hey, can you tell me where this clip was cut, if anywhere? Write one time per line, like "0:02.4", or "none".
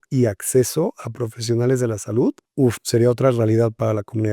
0:02.4